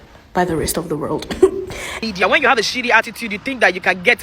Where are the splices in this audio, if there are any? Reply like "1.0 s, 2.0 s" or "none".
2.0 s